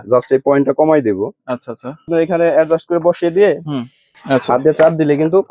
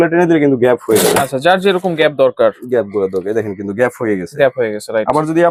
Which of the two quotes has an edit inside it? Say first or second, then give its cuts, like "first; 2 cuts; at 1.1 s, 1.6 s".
first; 2 cuts; at 2.1 s, 4.2 s